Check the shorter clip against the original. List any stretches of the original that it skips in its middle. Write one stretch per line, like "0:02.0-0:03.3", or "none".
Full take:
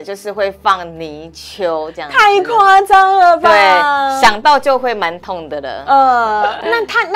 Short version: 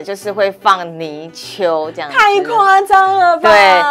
none